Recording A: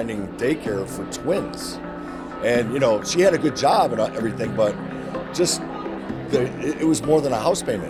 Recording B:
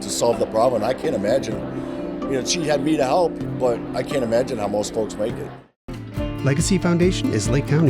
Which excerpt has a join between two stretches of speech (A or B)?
B